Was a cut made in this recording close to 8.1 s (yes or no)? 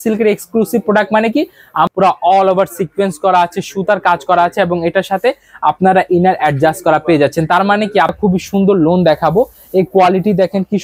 yes